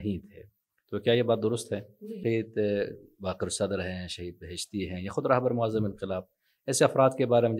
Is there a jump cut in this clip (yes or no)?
yes